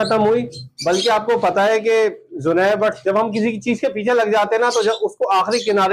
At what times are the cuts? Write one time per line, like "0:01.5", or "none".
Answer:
none